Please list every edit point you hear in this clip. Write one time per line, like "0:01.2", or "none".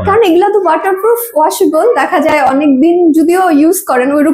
none